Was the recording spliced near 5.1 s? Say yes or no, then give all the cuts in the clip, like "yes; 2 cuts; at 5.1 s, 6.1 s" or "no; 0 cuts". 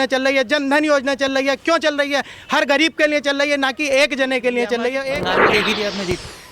yes; 1 cut; at 5.1 s